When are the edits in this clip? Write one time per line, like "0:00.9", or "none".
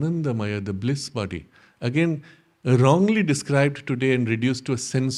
none